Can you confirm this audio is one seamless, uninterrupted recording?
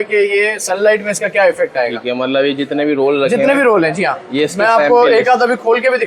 yes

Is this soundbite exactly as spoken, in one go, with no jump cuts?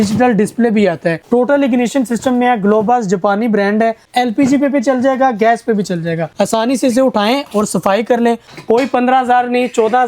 no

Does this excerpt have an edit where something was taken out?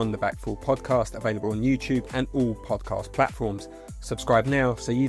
no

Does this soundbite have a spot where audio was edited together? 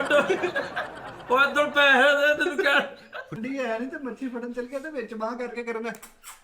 yes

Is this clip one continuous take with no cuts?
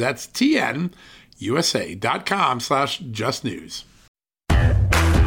no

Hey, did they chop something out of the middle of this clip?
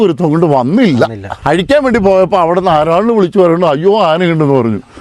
yes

